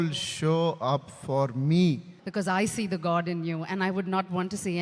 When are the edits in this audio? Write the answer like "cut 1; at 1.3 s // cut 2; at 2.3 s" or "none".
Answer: cut 1; at 2.2 s

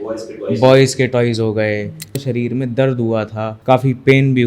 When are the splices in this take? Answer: cut 1; at 2.2 s // cut 2; at 3.5 s

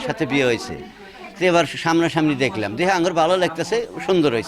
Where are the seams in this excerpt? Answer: none

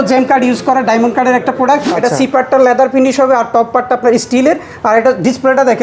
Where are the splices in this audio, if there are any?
cut 1; at 1.9 s

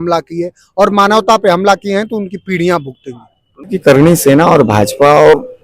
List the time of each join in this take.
cut 1; at 3.8 s

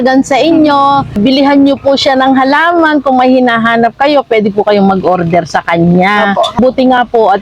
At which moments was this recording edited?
cut 1; at 1.1 s // cut 2; at 6.6 s

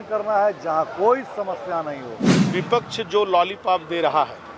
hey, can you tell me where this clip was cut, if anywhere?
cut 1; at 2.4 s

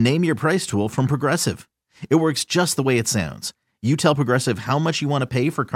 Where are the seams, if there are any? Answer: none

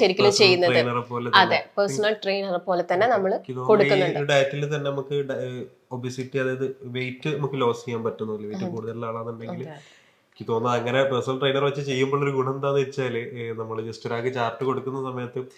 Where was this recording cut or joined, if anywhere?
none

